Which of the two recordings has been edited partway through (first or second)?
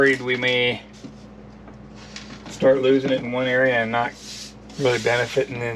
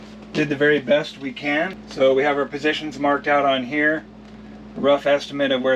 second